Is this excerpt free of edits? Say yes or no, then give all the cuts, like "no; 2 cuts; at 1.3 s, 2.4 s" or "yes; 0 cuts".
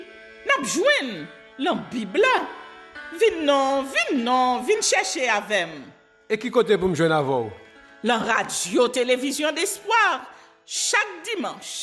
yes; 0 cuts